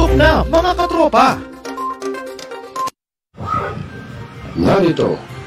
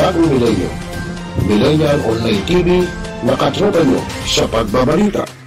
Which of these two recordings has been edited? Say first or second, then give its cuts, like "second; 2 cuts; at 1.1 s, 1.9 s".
first; 1 cut; at 3.3 s